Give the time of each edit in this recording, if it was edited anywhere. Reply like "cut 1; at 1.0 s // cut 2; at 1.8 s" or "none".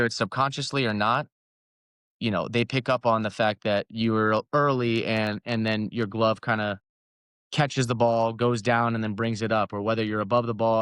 none